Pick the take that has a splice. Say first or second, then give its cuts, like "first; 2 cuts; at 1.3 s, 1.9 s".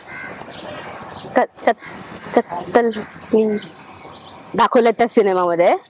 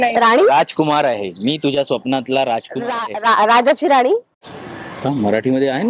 second; 1 cut; at 4.4 s